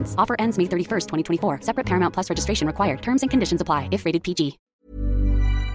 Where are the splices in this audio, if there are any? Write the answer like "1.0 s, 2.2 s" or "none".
4.6 s